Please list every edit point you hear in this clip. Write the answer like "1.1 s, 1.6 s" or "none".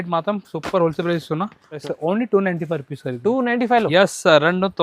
1.8 s